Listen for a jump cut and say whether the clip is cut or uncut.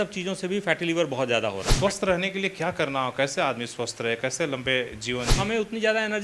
cut